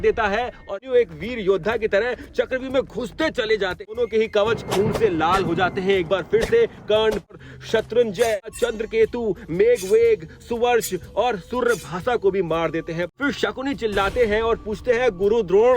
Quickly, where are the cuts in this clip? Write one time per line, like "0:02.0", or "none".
0:00.8
0:04.0
0:07.4
0:08.5
0:13.0